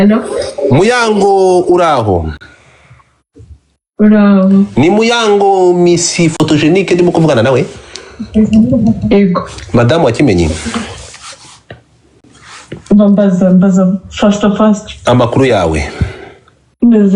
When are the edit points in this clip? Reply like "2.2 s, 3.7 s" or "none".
none